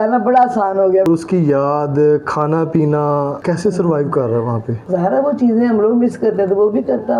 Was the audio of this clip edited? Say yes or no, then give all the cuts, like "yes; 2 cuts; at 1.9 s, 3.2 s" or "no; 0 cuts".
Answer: yes; 3 cuts; at 1.1 s, 3.4 s, 4.7 s